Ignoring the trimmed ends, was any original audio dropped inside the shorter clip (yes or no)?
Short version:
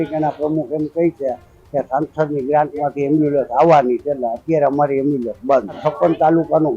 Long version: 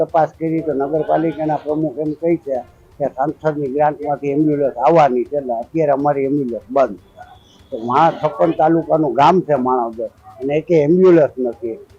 yes